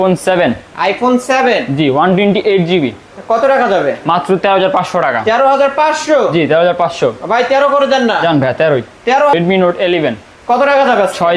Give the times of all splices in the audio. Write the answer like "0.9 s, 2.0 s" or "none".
9.3 s